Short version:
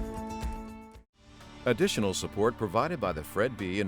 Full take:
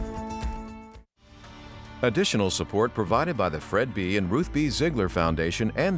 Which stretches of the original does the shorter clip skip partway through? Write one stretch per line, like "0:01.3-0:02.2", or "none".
0:01.4-0:01.8